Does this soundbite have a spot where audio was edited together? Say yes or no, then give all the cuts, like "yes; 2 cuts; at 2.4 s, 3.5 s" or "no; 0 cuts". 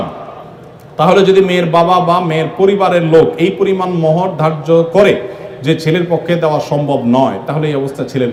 no; 0 cuts